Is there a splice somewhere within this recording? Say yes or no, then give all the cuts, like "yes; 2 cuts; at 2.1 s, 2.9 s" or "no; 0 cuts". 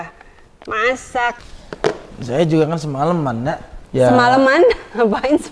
yes; 2 cuts; at 1.4 s, 3.7 s